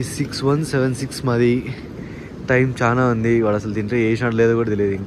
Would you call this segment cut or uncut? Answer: uncut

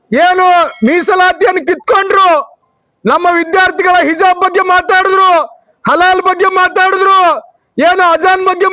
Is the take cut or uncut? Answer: uncut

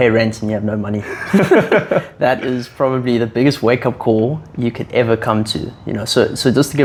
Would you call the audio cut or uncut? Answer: uncut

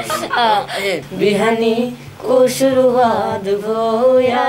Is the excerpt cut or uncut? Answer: cut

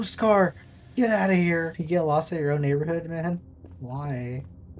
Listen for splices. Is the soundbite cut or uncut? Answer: cut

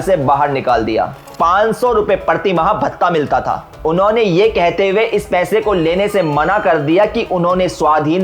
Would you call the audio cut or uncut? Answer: cut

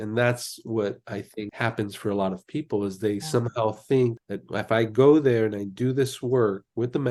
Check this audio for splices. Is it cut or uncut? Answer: uncut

